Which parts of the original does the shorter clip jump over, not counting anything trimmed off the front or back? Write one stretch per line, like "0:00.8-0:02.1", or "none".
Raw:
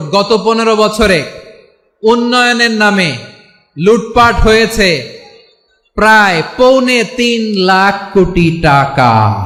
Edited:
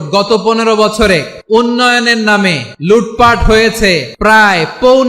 0:01.3-0:01.9
0:03.2-0:03.6
0:05.1-0:05.9